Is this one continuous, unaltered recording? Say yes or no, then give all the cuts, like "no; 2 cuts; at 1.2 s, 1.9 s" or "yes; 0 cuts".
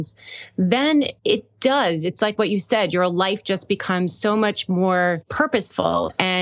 no; 2 cuts; at 1.2 s, 5.3 s